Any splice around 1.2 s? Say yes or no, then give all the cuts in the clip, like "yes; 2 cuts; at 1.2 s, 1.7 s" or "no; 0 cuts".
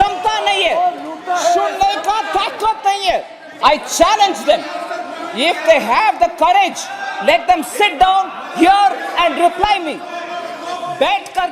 no; 1 cut; at 3.5 s